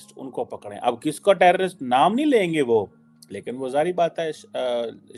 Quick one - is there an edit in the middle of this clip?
no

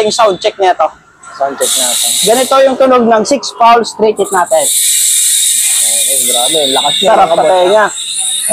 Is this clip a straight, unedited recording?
yes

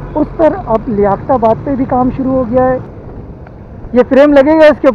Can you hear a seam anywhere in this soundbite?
yes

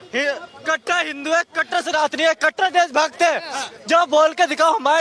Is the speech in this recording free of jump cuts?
yes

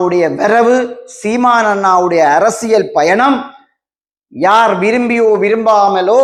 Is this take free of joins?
yes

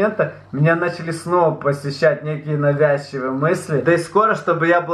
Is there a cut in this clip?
yes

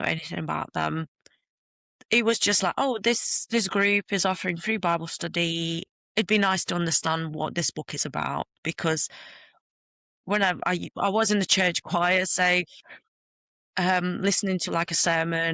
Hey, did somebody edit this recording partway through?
no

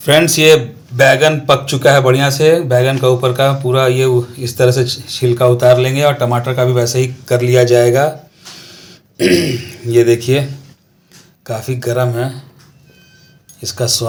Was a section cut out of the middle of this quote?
no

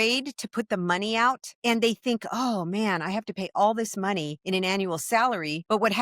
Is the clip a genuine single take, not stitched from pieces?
yes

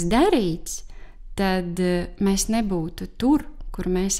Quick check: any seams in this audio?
no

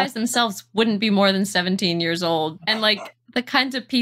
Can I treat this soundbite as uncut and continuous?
no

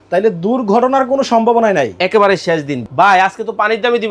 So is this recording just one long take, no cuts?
no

